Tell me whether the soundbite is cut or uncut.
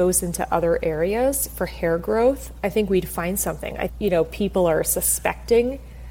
cut